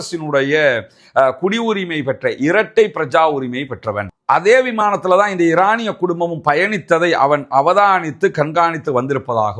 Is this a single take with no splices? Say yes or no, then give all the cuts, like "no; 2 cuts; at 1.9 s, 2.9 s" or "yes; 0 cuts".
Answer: no; 1 cut; at 4.1 s